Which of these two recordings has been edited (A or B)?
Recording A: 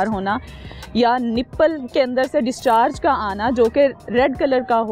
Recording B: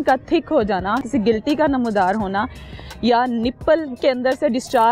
B